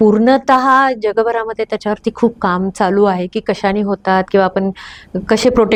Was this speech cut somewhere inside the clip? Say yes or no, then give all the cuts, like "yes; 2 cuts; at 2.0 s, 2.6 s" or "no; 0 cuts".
no; 0 cuts